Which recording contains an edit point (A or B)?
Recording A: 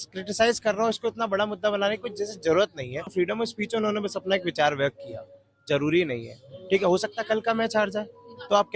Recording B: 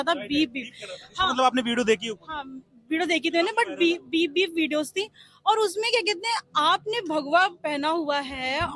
A